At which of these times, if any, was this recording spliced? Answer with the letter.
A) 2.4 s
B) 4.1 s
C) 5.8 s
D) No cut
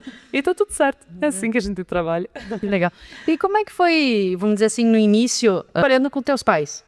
C